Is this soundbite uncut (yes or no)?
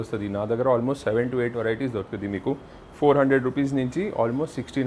yes